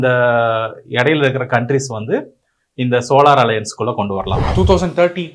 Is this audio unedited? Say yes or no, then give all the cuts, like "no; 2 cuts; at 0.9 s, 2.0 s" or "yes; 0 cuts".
no; 1 cut; at 4.4 s